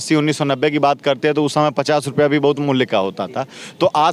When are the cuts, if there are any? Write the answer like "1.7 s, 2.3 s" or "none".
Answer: none